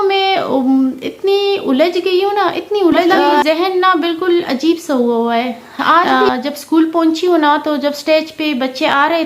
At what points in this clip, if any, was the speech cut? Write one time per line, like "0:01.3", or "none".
0:03.4
0:06.1